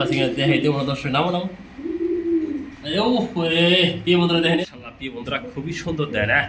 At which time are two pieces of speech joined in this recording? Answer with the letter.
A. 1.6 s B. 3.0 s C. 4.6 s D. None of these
C